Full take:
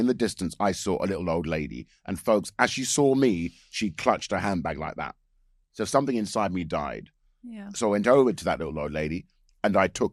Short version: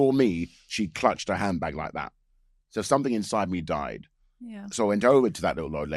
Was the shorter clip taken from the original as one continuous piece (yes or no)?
yes